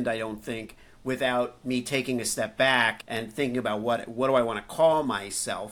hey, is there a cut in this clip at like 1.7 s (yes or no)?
no